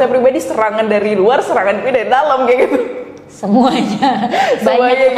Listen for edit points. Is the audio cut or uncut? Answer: uncut